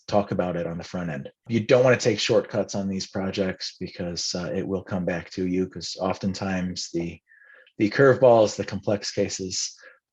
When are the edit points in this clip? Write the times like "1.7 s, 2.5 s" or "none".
1.5 s

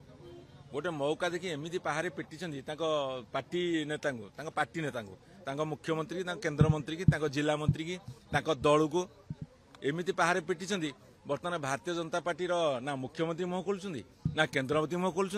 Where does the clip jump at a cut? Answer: none

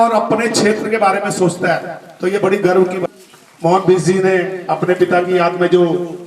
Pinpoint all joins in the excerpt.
3.0 s

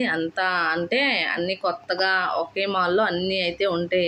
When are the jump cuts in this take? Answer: none

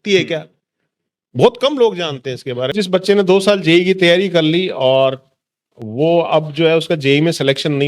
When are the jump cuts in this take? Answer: 2.7 s

